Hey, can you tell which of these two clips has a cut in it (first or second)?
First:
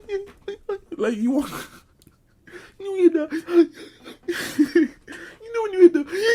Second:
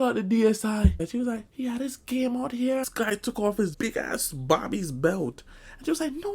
second